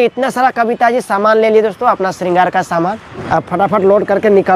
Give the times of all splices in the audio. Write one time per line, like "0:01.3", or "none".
0:03.1